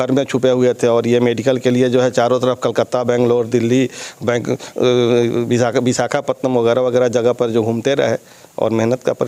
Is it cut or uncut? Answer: uncut